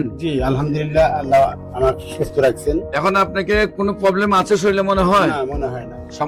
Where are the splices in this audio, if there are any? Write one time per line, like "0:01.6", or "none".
none